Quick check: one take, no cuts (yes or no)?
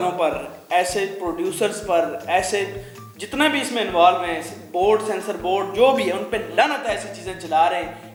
yes